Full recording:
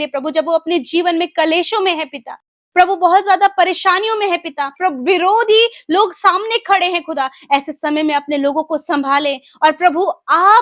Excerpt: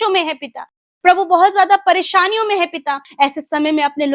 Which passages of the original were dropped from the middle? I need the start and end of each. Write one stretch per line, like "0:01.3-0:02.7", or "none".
0:04.7-0:07.3